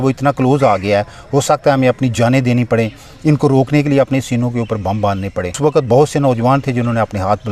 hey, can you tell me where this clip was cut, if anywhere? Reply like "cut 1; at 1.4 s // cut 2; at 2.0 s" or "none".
cut 1; at 5.6 s